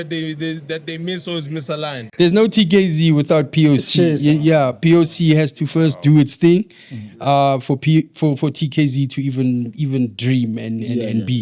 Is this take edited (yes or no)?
yes